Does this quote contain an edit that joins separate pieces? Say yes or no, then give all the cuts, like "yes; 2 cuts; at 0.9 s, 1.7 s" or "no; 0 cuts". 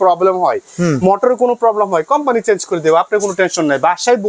no; 0 cuts